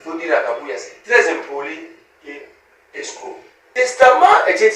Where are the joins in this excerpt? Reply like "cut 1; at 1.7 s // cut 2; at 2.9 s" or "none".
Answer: cut 1; at 3.5 s